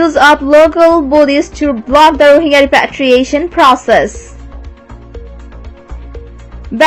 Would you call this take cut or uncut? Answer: uncut